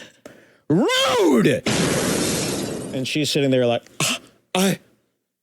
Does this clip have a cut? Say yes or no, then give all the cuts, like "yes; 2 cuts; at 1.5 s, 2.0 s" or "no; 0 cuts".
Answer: yes; 1 cut; at 2.8 s